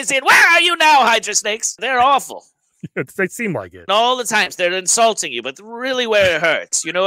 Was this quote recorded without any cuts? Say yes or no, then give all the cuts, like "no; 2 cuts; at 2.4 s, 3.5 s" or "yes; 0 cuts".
no; 2 cuts; at 1.8 s, 3.8 s